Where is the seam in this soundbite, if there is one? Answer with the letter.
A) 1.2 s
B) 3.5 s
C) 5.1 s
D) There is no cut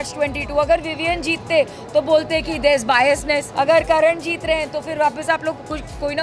B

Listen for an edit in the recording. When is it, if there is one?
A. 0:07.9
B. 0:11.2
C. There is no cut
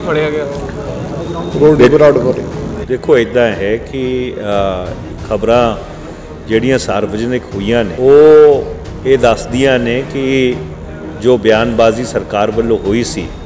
A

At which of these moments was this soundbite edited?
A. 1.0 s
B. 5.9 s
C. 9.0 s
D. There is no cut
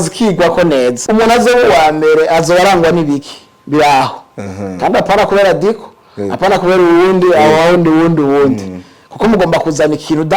A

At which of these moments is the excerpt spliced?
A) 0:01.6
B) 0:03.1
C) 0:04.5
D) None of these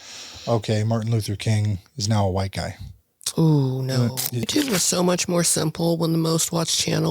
C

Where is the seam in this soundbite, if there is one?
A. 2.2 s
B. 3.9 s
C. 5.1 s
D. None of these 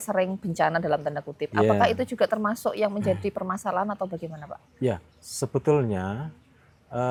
D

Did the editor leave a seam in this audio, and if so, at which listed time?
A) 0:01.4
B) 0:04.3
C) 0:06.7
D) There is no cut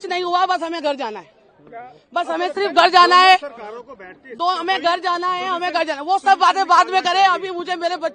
D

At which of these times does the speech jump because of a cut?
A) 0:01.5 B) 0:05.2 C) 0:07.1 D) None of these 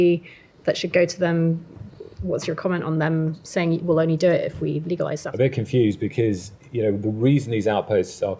B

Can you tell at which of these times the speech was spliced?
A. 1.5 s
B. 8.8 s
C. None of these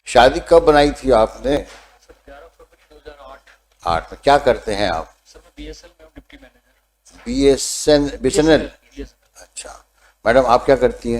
A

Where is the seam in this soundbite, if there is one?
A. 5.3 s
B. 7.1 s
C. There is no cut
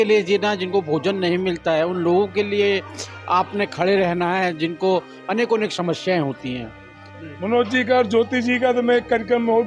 B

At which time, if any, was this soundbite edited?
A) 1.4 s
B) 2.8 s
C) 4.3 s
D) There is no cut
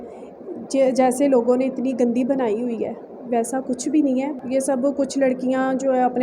C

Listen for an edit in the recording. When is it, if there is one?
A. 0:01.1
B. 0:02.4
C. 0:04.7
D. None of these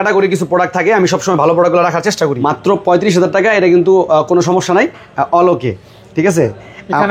B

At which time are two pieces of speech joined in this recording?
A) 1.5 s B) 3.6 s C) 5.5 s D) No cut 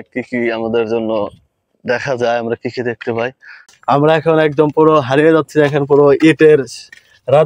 B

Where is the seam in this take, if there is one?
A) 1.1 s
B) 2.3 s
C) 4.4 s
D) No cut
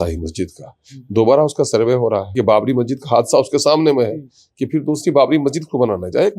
B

